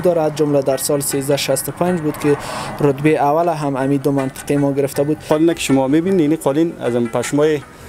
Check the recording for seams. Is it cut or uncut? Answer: cut